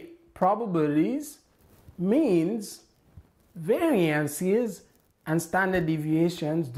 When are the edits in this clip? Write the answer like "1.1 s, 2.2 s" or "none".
none